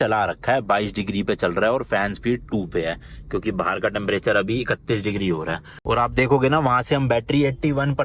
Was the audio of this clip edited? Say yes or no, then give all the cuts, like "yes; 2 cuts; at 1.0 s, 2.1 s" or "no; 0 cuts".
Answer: yes; 1 cut; at 5.8 s